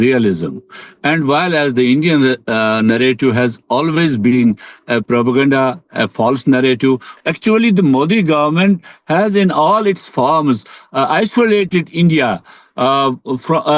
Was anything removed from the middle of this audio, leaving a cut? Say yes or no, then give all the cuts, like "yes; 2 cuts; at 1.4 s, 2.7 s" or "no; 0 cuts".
yes; 1 cut; at 7.1 s